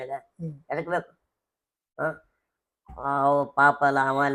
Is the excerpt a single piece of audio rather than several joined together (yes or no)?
yes